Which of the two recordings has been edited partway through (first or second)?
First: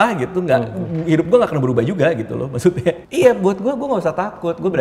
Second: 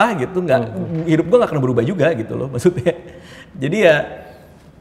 first